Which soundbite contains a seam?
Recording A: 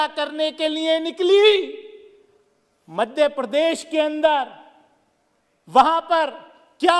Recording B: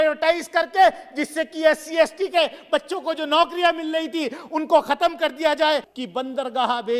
B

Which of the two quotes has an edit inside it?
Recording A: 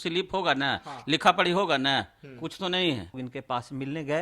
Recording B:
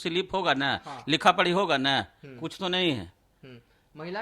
A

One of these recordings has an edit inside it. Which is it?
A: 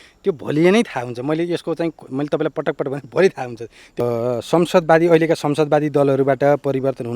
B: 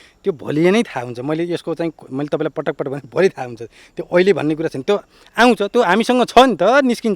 A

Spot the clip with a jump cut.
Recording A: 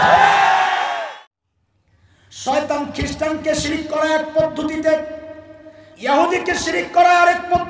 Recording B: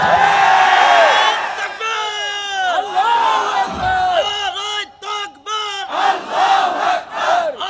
A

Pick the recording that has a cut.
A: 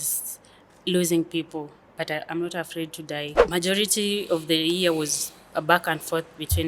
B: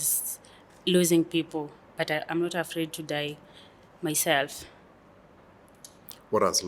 A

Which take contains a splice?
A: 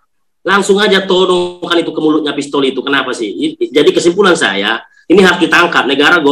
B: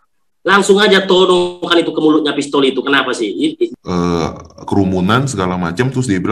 B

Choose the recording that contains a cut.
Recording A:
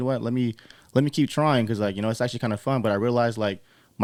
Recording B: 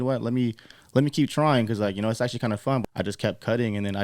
B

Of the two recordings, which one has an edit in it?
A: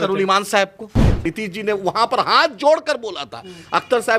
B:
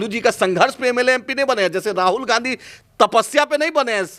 A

